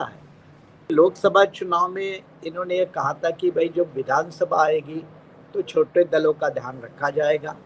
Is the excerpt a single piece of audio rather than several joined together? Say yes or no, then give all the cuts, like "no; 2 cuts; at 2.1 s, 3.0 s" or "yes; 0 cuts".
no; 1 cut; at 0.9 s